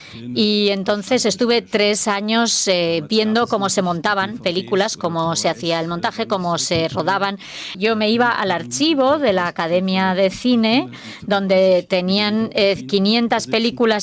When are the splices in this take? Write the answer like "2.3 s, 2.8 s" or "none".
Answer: 7.7 s